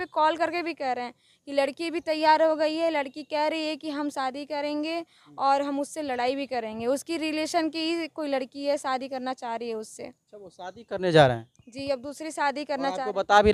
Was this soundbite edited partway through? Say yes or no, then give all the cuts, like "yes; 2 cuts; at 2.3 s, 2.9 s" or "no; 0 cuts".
no; 0 cuts